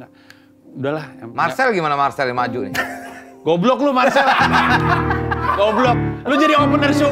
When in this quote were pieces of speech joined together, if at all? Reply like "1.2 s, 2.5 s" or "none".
none